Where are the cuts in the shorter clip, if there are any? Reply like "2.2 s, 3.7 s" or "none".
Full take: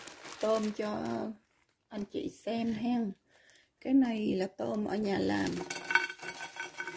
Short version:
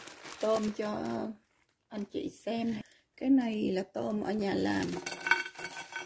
2.8 s